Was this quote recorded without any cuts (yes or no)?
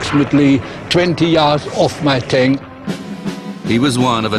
no